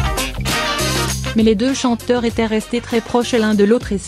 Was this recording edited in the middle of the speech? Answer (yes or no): yes